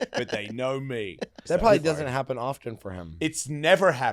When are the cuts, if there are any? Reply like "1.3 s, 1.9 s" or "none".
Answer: 1.4 s